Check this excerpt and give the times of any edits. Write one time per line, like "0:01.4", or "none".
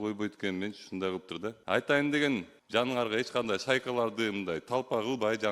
0:01.6
0:02.6